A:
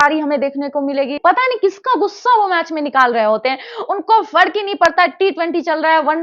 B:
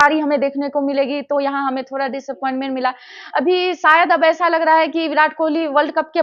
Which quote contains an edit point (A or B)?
A